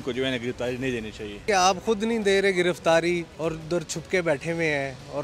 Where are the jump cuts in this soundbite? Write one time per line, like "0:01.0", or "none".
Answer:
0:01.4
0:03.3